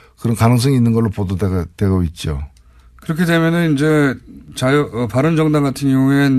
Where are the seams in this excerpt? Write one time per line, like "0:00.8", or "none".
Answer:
0:02.4